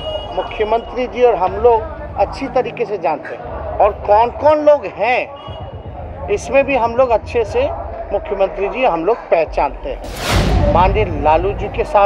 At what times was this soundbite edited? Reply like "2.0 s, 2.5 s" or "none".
10.2 s